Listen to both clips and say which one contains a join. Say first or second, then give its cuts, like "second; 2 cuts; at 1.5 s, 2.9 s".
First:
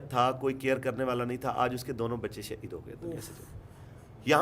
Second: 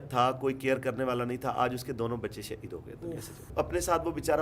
second; 1 cut; at 3.5 s